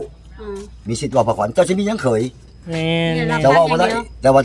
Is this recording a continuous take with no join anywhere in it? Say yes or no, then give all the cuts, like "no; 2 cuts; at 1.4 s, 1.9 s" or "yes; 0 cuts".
yes; 0 cuts